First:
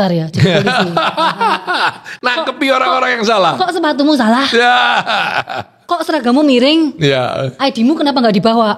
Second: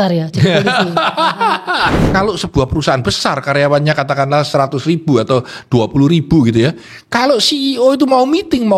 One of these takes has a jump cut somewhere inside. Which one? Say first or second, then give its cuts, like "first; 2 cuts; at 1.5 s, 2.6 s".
second; 1 cut; at 2.0 s